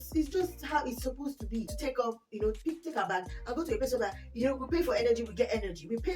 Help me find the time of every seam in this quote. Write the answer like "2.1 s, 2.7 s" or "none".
1.7 s